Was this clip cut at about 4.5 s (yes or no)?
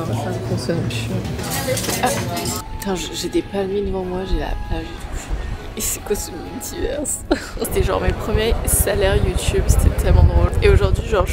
no